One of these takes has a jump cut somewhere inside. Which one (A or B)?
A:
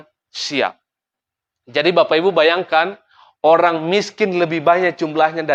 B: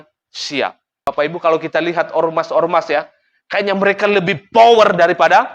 B